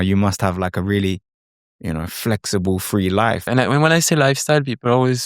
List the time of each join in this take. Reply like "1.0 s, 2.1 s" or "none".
3.4 s